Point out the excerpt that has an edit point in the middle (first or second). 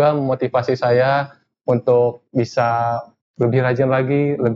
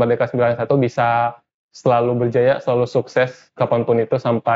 first